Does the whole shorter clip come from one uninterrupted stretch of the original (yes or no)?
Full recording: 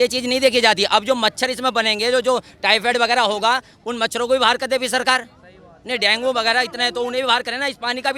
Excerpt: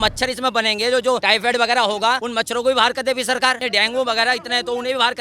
no